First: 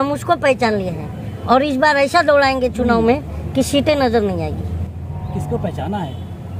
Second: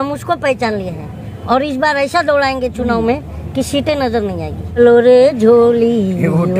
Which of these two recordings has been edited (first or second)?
second